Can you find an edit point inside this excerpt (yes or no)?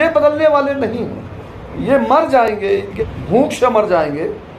yes